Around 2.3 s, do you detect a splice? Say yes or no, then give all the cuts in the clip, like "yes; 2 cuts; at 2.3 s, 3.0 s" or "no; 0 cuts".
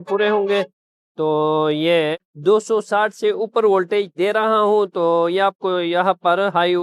yes; 1 cut; at 2.3 s